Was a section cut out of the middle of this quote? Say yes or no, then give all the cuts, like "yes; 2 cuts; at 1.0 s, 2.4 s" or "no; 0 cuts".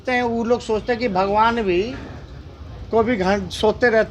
no; 0 cuts